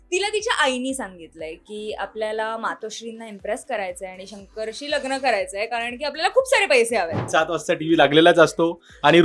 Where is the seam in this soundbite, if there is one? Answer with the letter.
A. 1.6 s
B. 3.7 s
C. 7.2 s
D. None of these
C